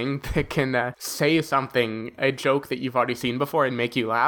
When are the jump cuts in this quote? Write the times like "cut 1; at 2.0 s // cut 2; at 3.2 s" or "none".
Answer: cut 1; at 1.0 s